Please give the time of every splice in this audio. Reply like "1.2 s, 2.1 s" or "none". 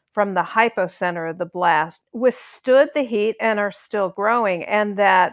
2.0 s